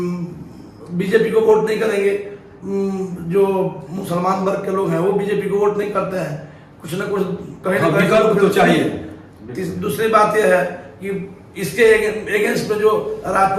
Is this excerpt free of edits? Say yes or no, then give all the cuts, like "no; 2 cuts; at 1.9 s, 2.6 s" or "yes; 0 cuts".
yes; 0 cuts